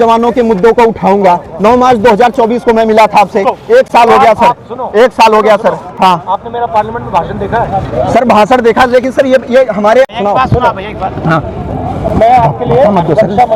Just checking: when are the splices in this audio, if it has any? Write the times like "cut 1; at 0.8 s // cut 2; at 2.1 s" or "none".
none